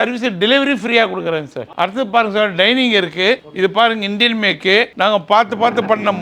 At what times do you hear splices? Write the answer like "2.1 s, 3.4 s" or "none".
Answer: none